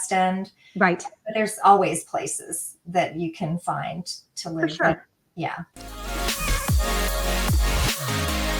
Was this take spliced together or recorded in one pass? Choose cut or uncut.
cut